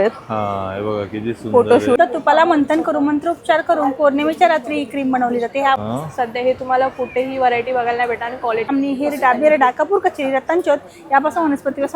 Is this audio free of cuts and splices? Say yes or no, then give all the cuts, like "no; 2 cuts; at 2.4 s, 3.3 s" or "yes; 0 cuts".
no; 3 cuts; at 2.0 s, 5.8 s, 8.7 s